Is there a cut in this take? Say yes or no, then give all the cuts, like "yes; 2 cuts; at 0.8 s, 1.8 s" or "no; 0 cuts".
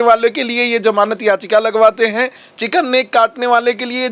no; 0 cuts